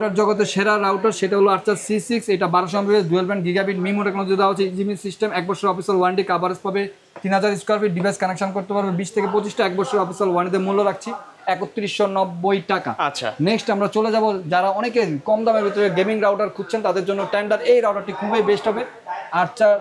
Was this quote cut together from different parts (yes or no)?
no